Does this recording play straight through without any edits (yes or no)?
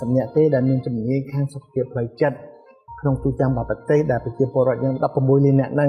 no